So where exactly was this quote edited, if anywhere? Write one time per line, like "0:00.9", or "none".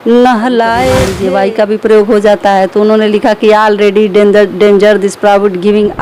0:01.1